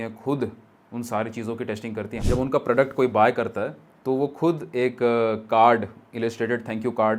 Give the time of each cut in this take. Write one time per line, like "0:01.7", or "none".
0:02.1